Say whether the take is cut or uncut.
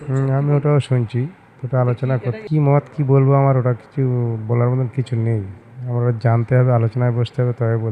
uncut